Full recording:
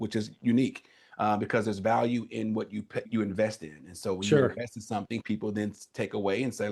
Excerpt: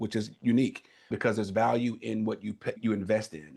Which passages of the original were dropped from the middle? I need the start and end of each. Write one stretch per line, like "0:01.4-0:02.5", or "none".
0:01.1-0:01.4